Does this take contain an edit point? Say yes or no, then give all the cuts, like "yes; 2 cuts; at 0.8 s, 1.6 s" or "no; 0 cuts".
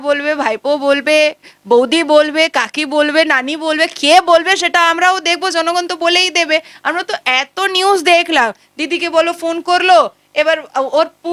no; 0 cuts